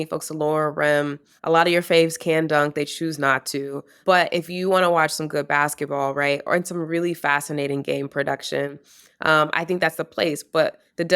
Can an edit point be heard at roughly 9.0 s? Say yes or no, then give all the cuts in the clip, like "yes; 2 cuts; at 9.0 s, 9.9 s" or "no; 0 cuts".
no; 2 cuts; at 1.3 s, 4.0 s